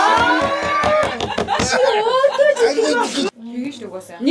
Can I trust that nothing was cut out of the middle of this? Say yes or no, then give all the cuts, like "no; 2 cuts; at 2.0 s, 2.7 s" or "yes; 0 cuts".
no; 1 cut; at 3.3 s